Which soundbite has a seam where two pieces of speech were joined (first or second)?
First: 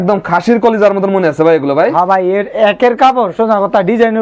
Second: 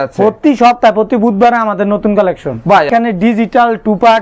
second